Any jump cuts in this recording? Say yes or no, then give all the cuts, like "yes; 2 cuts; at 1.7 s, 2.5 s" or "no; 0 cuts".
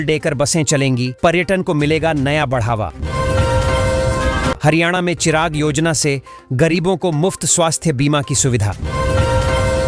no; 0 cuts